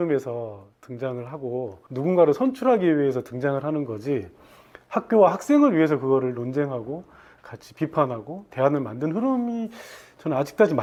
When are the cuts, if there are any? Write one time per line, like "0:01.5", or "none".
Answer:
none